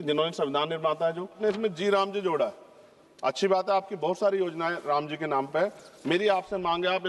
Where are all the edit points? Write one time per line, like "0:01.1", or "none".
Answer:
0:01.4